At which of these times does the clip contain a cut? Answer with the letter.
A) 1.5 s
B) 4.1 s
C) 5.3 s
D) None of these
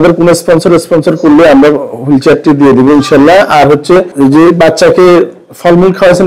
B